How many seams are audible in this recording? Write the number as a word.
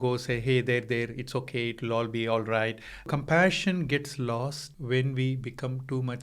two